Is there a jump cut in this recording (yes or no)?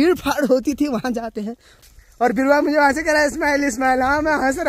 yes